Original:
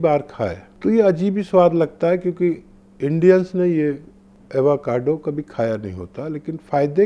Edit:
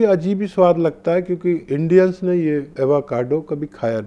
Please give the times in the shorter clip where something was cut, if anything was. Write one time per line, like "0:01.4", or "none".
0:01.7
0:02.7